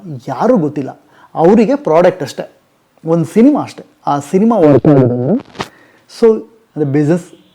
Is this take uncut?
no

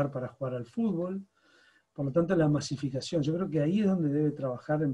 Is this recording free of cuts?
yes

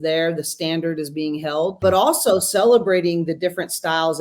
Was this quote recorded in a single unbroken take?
no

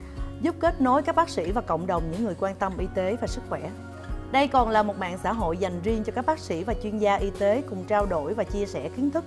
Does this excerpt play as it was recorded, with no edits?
yes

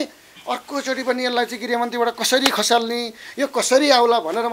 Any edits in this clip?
no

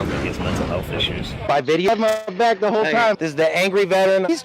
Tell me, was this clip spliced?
yes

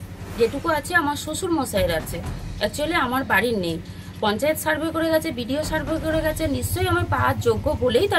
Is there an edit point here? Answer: no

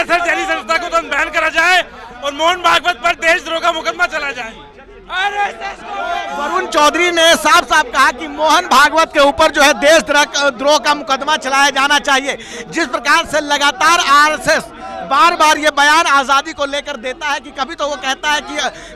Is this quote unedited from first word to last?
yes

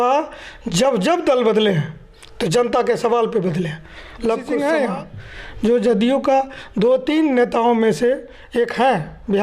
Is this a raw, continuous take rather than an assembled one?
no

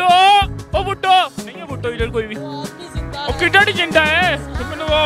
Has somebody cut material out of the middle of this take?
no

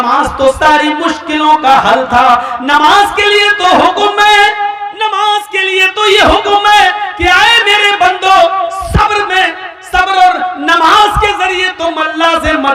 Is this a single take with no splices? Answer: yes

